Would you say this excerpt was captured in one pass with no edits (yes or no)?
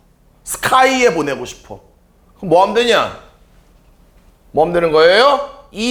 yes